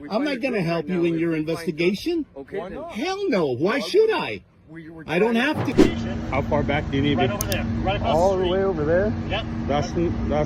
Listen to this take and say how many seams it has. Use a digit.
1